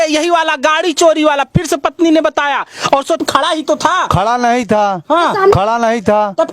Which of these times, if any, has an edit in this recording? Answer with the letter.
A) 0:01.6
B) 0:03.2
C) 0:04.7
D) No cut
B